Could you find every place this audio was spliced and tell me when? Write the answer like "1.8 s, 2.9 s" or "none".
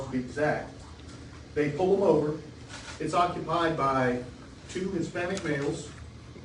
none